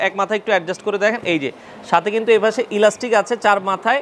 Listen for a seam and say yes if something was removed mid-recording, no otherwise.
no